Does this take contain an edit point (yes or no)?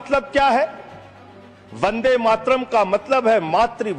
no